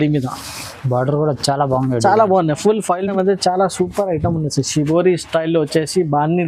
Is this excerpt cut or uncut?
cut